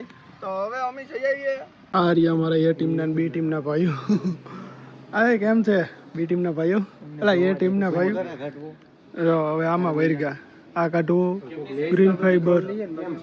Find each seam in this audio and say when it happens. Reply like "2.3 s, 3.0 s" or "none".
1.8 s